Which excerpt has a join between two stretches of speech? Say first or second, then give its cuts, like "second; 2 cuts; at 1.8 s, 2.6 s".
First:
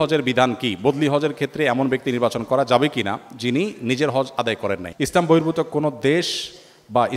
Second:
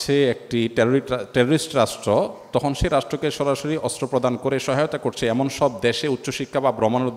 first; 1 cut; at 4.9 s